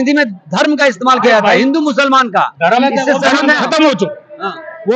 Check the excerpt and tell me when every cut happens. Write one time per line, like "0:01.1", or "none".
none